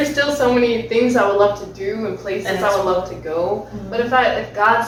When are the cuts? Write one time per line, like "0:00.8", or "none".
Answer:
none